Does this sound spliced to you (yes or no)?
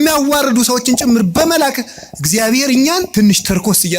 yes